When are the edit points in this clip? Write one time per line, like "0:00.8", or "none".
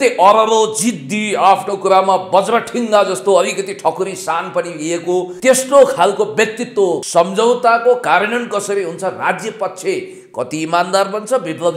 0:05.3
0:07.0